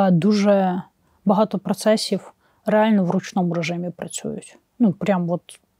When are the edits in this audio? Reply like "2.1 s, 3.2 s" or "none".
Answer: none